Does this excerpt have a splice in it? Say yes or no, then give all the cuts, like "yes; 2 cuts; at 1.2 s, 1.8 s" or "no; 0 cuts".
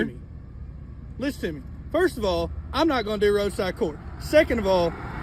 no; 0 cuts